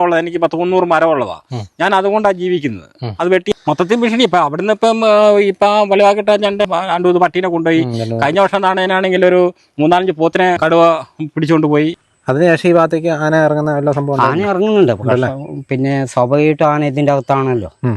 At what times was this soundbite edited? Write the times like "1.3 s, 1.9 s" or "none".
3.5 s, 6.7 s, 10.6 s, 12.0 s